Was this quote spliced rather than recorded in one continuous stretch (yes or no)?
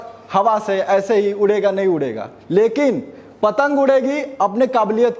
no